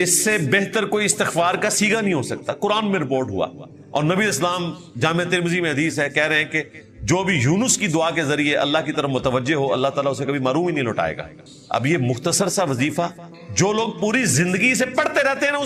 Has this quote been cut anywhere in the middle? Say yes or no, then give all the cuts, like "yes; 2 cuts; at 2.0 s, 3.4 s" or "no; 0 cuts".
no; 0 cuts